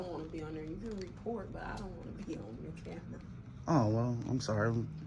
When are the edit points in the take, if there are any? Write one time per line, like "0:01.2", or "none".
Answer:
none

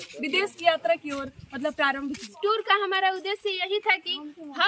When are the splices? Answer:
0:02.4

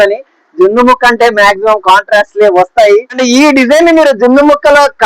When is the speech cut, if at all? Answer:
0:03.2

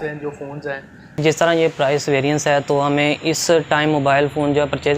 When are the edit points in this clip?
0:01.2

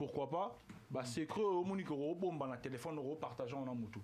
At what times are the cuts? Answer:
none

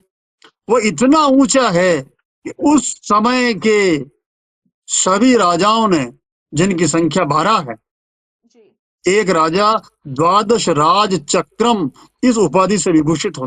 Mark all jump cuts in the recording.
none

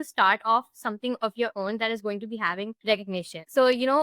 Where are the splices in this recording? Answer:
0:03.0

